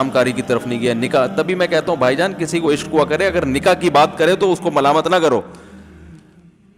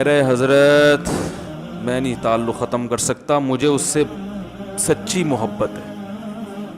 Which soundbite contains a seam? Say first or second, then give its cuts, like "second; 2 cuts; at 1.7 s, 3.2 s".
second; 1 cut; at 5.7 s